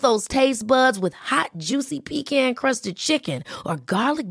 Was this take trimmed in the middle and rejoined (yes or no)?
no